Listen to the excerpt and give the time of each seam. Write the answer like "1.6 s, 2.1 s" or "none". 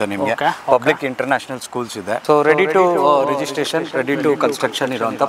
2.2 s